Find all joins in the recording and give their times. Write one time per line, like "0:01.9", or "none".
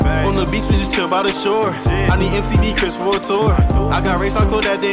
none